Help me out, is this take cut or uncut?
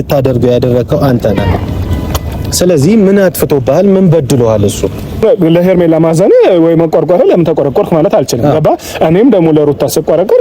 cut